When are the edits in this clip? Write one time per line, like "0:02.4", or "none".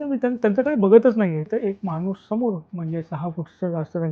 0:01.5
0:02.7